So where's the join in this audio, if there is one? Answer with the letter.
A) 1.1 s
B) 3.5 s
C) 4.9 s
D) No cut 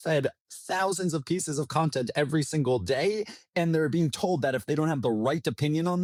D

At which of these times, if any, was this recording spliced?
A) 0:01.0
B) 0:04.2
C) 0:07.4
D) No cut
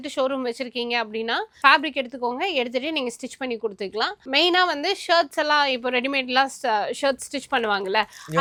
D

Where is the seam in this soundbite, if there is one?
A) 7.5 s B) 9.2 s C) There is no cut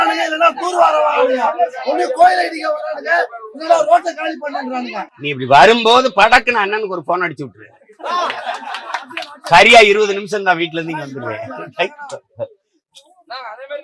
C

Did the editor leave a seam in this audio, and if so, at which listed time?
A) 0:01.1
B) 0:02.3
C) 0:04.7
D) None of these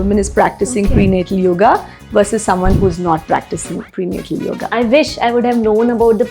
C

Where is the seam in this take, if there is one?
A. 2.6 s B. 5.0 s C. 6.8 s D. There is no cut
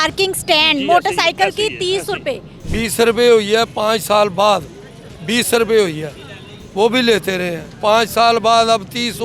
A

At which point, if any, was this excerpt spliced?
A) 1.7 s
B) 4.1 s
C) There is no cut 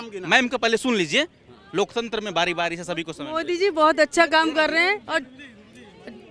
C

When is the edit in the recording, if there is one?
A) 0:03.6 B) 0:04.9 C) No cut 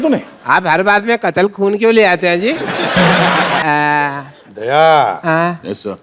A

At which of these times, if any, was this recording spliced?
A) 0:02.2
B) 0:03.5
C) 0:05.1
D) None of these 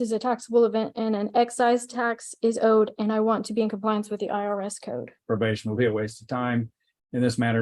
C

